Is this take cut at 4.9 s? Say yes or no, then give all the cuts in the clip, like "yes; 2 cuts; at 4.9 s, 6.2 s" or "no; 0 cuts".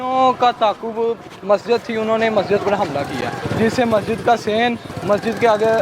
yes; 2 cuts; at 3.4 s, 4.9 s